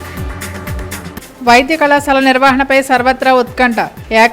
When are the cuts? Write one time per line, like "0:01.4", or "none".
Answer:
0:01.0